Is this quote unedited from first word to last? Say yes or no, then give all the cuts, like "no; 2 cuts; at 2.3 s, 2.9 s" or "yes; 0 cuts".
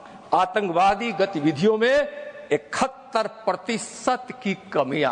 yes; 0 cuts